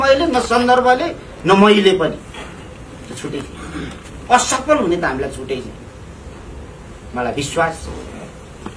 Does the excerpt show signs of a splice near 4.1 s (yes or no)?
no